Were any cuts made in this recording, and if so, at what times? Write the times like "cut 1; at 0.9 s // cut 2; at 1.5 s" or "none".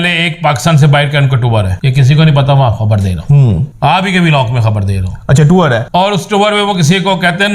cut 1; at 1.8 s // cut 2; at 3.7 s // cut 3; at 5.8 s